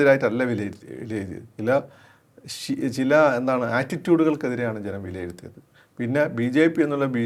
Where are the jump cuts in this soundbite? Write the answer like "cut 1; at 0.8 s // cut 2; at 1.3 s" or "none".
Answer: none